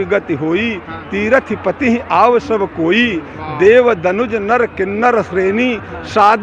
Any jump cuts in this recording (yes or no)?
no